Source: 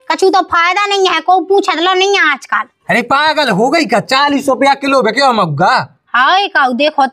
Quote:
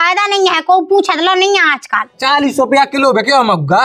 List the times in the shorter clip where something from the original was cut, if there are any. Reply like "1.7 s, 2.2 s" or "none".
2.2 s